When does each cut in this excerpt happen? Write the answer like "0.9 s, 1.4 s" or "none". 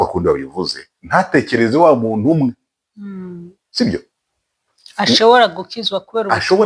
none